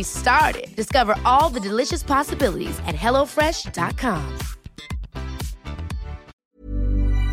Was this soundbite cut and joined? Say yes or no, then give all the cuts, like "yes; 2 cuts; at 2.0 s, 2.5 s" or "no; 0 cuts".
yes; 1 cut; at 6.4 s